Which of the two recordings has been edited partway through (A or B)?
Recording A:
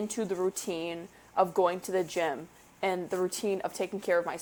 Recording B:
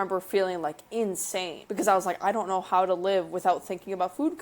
B